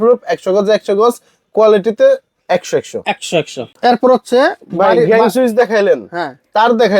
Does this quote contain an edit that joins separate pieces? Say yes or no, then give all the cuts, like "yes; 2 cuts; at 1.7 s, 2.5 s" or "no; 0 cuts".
yes; 1 cut; at 3.6 s